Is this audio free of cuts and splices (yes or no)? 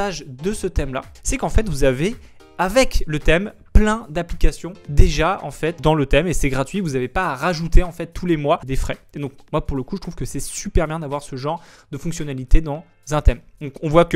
yes